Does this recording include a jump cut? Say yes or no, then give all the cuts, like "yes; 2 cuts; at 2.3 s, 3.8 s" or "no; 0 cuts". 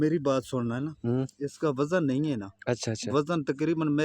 no; 0 cuts